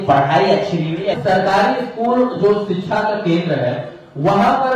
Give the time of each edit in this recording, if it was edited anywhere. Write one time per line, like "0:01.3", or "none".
0:01.1